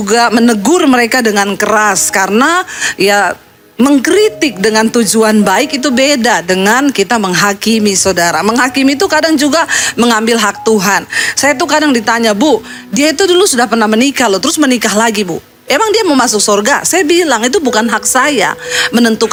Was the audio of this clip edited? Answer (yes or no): no